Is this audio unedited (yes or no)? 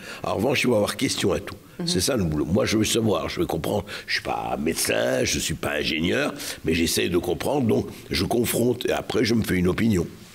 yes